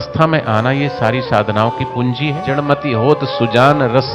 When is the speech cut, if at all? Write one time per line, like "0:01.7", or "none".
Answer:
0:02.5